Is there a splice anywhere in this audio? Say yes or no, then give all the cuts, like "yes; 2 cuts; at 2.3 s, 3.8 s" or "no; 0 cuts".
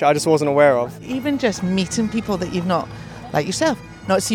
yes; 1 cut; at 1.1 s